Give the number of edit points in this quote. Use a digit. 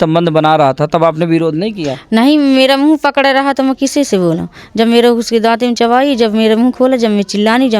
0